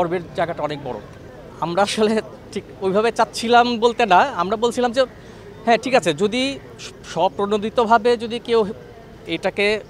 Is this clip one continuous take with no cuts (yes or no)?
yes